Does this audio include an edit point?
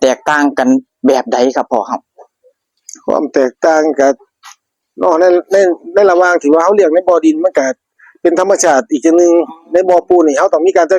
no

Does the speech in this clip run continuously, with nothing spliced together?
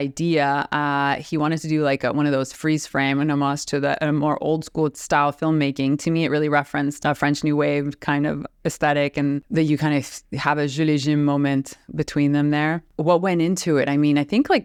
yes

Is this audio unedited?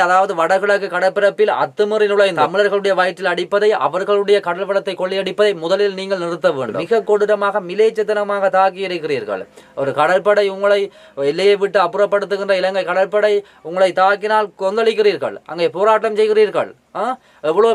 no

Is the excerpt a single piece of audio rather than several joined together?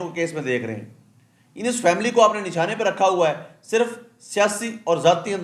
yes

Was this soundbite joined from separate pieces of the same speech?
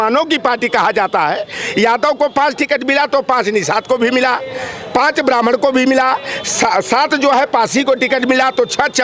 no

